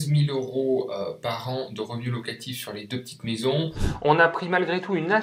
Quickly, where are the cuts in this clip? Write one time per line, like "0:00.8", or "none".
0:03.9